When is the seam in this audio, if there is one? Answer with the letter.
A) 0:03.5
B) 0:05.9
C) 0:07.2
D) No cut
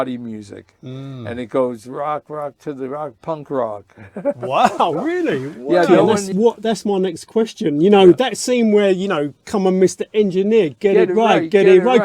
B